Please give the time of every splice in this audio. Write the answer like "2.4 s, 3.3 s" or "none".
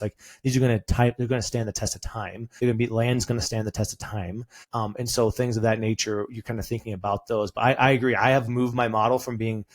2.4 s, 4.5 s

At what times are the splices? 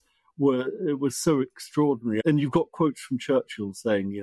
2.2 s

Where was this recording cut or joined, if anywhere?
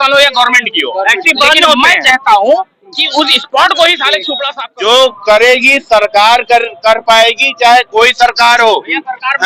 4.4 s

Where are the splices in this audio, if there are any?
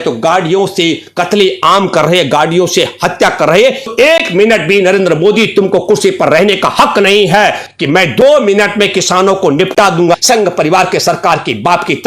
3.9 s, 7.7 s, 10.2 s

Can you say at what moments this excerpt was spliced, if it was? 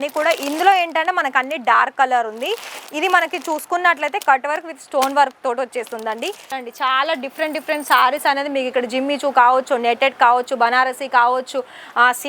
6.6 s

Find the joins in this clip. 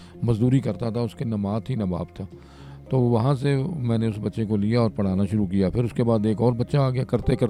none

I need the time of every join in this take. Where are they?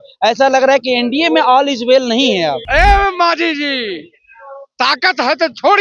2.6 s

